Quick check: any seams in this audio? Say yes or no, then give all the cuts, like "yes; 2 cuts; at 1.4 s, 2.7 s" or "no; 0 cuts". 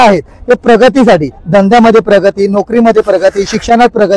no; 0 cuts